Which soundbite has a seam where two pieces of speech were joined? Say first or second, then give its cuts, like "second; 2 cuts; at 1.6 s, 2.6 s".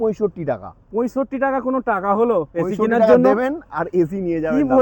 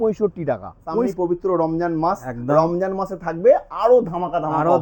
second; 1 cut; at 1.1 s